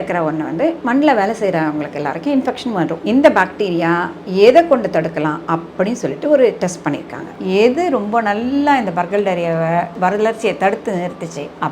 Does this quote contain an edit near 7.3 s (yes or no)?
yes